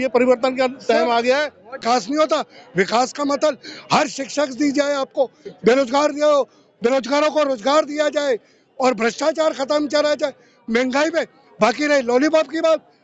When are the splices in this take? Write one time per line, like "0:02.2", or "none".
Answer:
0:01.7

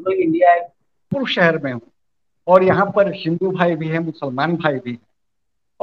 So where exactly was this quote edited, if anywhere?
0:01.1

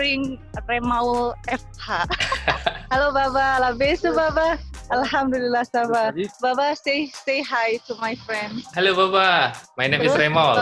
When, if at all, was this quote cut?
0:02.8
0:08.6
0:09.7

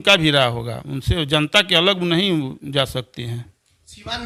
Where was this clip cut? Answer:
none

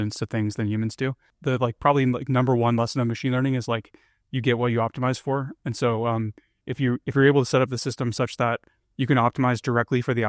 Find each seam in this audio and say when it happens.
0:01.3

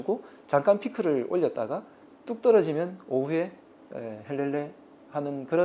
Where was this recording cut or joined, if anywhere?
none

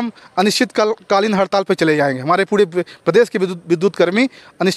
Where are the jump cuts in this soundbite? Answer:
none

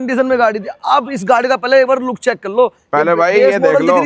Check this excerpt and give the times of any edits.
none

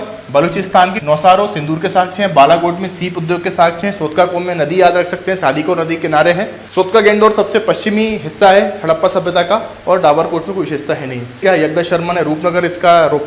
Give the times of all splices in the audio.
0:01.0
0:06.6
0:11.4

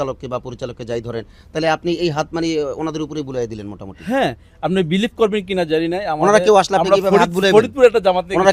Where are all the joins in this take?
none

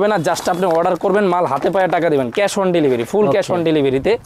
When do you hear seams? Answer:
none

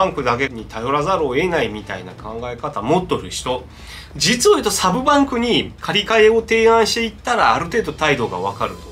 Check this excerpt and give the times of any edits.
none

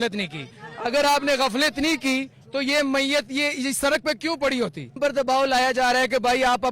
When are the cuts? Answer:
0:05.0

